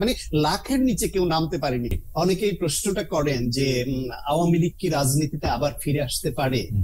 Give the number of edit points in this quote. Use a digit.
1